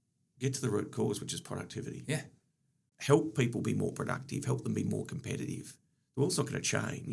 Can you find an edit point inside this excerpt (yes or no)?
yes